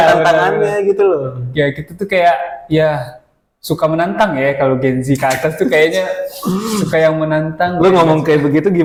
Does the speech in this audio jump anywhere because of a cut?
no; 0 cuts

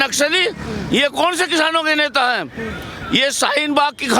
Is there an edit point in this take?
no; 0 cuts

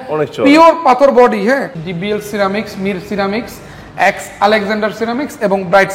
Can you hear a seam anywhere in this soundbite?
yes; 1 cut; at 1.8 s

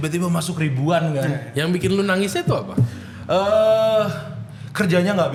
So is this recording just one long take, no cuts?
yes; 0 cuts

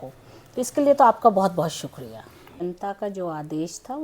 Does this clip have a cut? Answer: yes; 1 cut; at 2.6 s

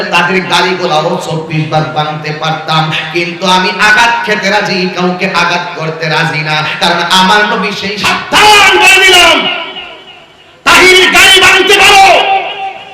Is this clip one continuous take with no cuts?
no; 1 cut; at 7.9 s

